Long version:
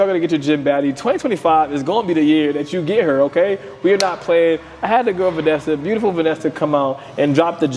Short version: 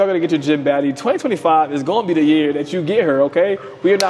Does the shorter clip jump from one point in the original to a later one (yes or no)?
no